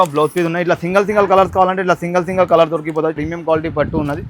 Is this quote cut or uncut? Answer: cut